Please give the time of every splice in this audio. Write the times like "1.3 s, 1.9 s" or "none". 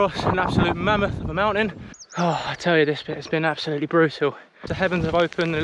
1.9 s, 4.7 s